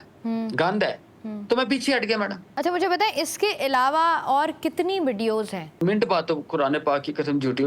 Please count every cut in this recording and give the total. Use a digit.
2